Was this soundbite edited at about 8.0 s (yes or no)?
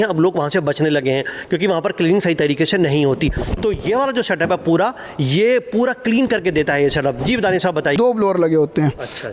yes